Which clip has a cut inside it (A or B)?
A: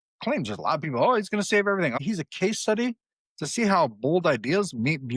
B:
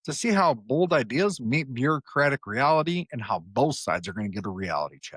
A